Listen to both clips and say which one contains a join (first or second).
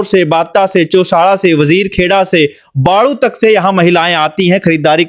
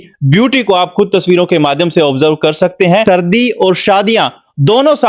second